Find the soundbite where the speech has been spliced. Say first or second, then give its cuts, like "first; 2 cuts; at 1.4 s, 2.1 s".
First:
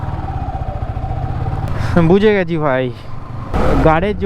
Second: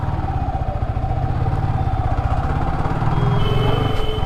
first; 1 cut; at 1.7 s